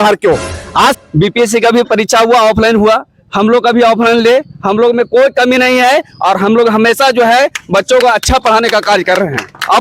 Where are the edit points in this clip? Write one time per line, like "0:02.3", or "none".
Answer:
0:01.0